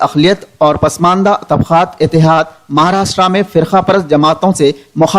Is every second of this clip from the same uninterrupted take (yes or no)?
no